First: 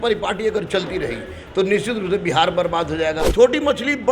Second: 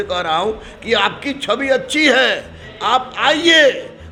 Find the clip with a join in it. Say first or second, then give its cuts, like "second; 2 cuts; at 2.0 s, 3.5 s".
first; 1 cut; at 3.2 s